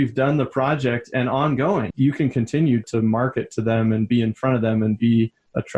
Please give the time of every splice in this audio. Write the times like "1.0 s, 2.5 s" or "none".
1.9 s